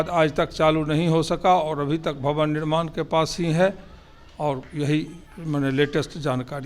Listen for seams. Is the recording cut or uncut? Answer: uncut